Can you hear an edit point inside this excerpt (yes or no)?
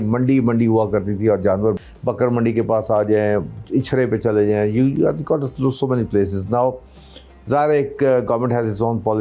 yes